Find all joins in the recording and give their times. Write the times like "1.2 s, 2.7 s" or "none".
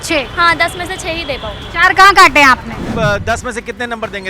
2.9 s